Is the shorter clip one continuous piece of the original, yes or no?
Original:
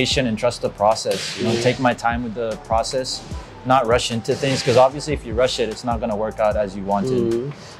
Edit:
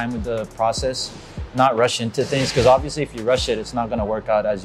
yes